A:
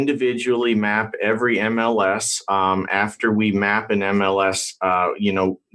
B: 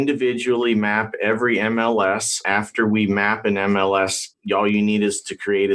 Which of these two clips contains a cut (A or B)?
B